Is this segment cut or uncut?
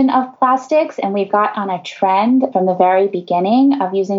uncut